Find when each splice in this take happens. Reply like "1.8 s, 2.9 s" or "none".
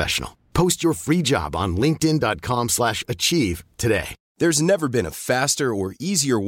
none